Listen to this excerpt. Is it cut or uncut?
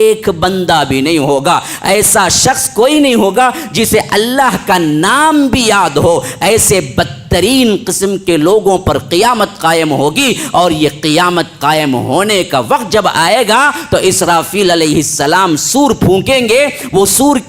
uncut